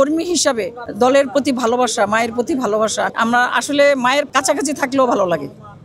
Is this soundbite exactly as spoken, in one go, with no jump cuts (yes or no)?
no